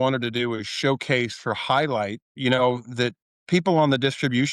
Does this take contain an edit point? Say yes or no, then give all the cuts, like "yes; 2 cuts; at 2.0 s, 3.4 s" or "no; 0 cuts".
yes; 1 cut; at 3.3 s